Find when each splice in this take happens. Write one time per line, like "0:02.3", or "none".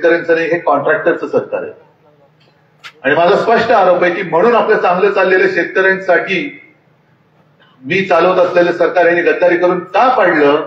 none